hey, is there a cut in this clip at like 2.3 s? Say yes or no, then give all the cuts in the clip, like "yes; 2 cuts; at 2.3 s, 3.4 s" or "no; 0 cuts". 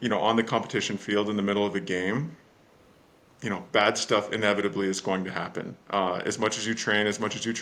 no; 0 cuts